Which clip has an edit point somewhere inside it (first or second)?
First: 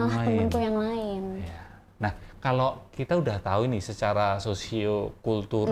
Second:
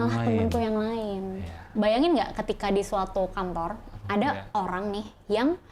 second